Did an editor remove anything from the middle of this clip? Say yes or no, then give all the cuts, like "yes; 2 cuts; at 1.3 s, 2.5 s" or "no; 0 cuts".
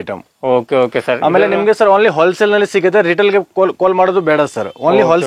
no; 0 cuts